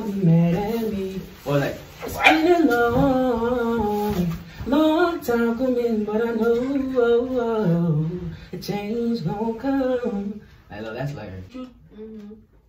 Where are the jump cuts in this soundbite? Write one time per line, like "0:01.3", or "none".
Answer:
0:11.4